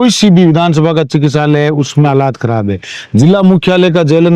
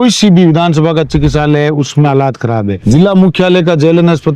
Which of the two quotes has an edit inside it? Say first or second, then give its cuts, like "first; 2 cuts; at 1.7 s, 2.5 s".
second; 1 cut; at 2.7 s